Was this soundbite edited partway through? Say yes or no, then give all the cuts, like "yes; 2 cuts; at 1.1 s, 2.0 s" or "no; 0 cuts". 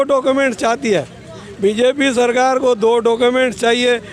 no; 0 cuts